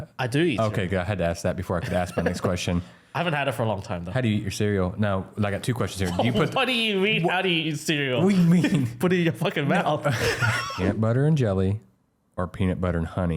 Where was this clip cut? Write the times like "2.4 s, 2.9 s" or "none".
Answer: 10.7 s